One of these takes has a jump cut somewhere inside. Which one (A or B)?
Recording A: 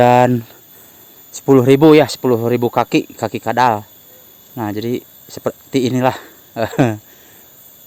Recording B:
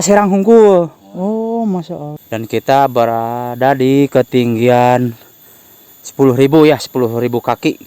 B